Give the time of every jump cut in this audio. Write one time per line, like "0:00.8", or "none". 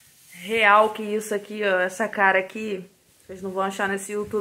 none

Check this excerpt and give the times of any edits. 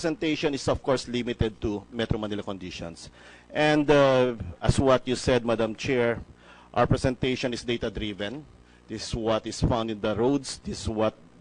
0:05.5

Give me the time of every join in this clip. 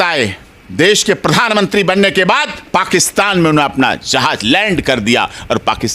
none

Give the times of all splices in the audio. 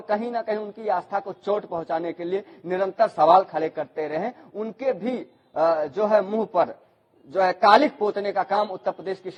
none

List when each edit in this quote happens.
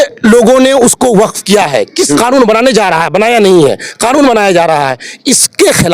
0:02.0

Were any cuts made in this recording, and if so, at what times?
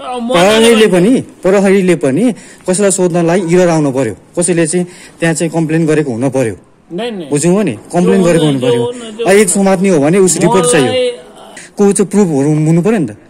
0:11.6

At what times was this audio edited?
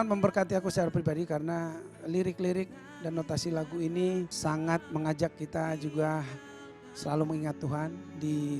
0:04.3

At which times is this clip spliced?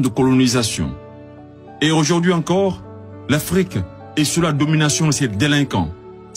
none

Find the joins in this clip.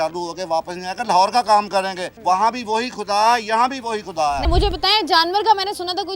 0:02.0
0:04.5

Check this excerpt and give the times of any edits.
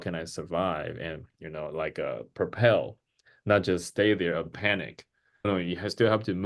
0:05.5

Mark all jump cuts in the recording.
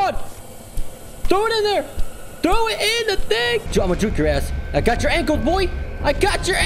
0:03.7

